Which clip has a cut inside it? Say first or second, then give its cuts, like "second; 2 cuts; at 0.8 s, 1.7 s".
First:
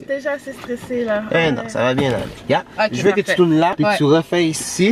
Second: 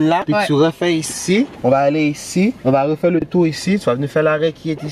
first; 1 cut; at 2.4 s